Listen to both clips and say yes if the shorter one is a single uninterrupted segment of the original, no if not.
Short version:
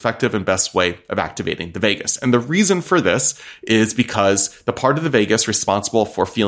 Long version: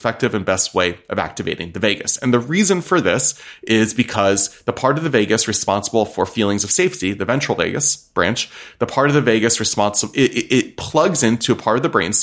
yes